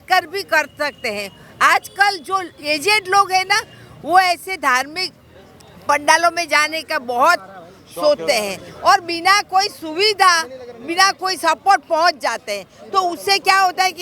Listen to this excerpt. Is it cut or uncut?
uncut